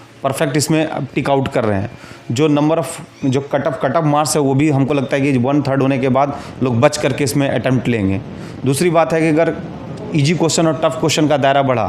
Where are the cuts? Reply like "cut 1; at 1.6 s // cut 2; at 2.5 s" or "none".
none